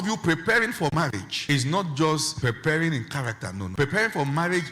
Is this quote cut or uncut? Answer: cut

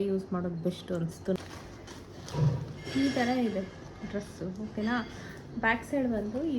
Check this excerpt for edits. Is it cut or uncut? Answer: cut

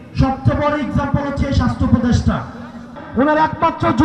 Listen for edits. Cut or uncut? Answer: cut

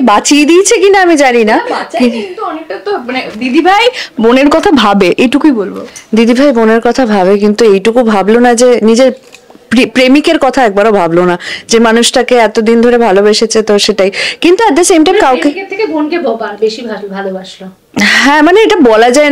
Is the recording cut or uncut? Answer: uncut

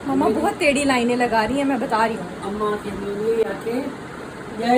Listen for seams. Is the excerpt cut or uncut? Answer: uncut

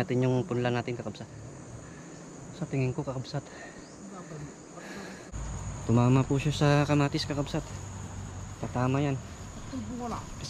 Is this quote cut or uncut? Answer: cut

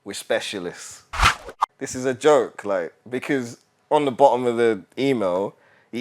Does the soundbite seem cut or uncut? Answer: cut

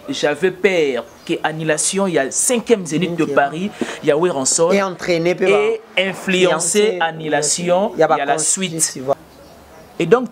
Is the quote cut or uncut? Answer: cut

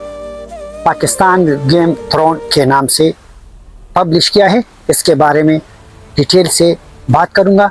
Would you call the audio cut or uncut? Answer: uncut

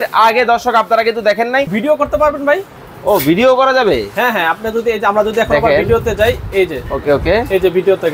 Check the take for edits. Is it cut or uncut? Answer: cut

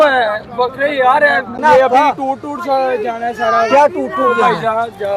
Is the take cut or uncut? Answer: cut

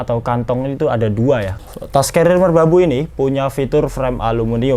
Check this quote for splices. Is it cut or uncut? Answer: cut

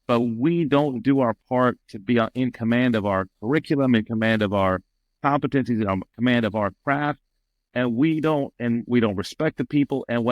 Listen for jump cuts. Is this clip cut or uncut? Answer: uncut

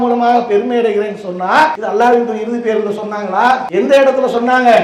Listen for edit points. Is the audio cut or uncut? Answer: cut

